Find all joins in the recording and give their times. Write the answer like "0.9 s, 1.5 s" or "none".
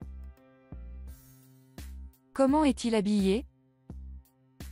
1.9 s, 3.5 s